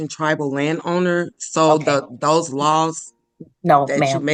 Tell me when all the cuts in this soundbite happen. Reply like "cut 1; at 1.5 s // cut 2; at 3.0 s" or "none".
none

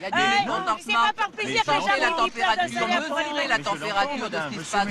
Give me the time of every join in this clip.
none

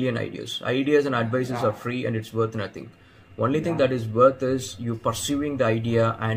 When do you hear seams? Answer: none

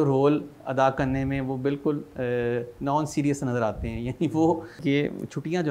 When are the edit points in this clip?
cut 1; at 4.8 s

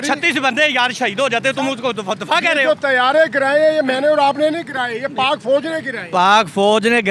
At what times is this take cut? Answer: none

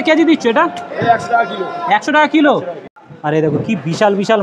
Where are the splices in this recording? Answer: cut 1; at 2.8 s

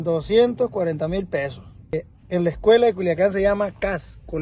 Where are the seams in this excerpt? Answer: cut 1; at 1.9 s

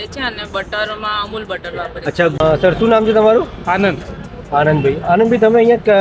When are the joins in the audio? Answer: cut 1; at 2.4 s

